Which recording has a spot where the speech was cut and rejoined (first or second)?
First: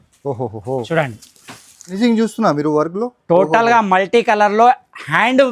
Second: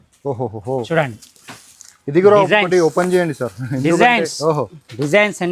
first